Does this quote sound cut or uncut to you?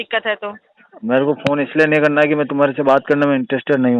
uncut